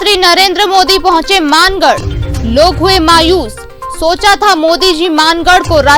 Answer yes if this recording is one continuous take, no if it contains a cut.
yes